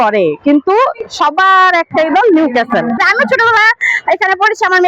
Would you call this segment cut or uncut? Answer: cut